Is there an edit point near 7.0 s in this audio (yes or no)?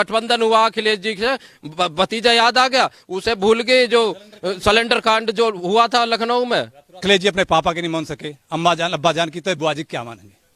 yes